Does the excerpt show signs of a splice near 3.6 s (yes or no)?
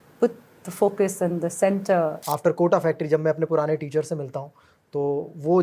no